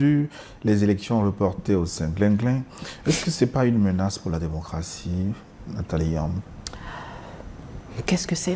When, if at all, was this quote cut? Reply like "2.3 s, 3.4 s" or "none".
none

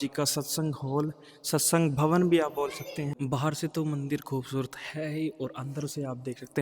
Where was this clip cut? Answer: 3.1 s

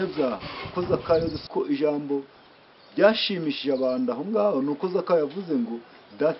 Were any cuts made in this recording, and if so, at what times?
1.4 s

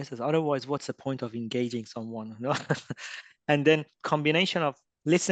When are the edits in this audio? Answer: none

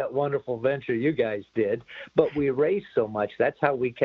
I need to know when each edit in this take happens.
none

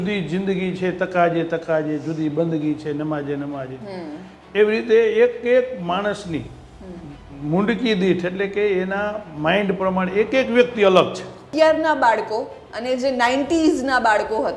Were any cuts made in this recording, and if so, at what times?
11.5 s

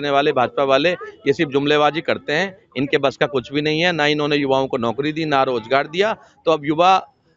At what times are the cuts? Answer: none

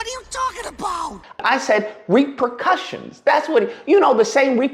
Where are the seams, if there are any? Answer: 1.4 s

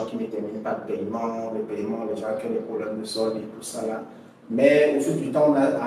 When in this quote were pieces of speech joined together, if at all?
none

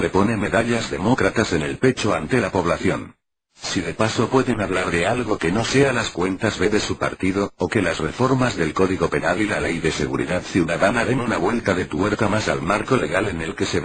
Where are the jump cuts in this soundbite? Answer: none

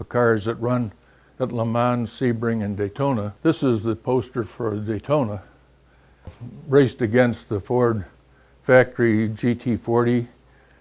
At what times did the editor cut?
3.3 s

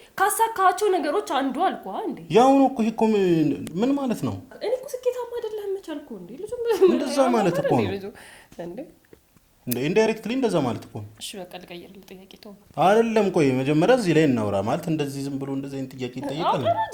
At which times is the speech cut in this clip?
4.5 s

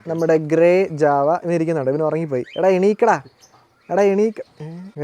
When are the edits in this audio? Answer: none

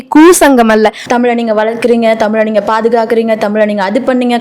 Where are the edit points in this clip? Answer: 1.0 s

